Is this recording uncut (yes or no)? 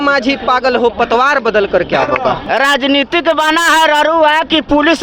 no